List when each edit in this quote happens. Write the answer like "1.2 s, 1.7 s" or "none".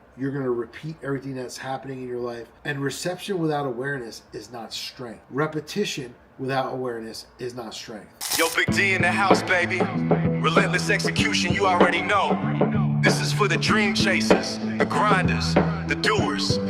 2.5 s, 5.2 s, 8.2 s